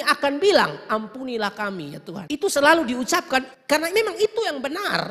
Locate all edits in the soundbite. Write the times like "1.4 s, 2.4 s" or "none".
2.2 s, 3.5 s